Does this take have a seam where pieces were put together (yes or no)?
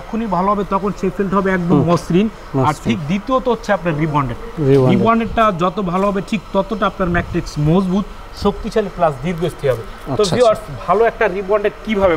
no